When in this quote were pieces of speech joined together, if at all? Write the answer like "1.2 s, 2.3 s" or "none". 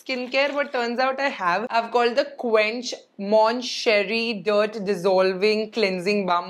none